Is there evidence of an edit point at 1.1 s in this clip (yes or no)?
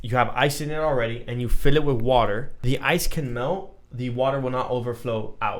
no